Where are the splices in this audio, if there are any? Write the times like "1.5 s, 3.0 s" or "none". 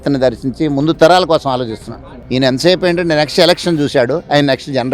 2.2 s